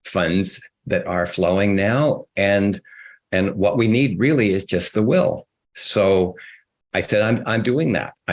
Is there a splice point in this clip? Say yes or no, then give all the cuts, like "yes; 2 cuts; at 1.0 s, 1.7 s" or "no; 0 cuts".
no; 0 cuts